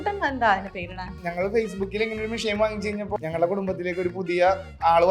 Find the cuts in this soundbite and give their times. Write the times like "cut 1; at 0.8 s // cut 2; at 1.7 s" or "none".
cut 1; at 1.2 s // cut 2; at 3.2 s